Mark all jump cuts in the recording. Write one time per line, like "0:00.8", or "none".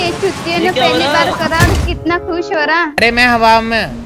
0:03.0